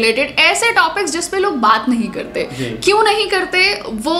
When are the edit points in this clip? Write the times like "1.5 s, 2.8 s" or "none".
none